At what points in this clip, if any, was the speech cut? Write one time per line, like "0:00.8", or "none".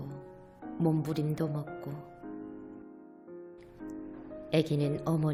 none